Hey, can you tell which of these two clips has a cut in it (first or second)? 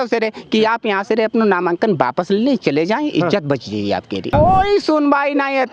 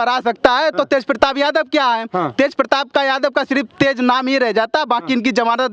first